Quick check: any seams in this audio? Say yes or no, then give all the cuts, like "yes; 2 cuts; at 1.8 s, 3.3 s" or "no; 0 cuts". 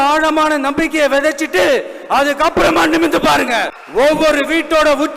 yes; 1 cut; at 3.7 s